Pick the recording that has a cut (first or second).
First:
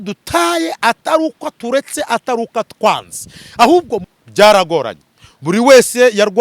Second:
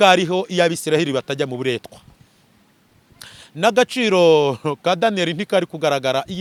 first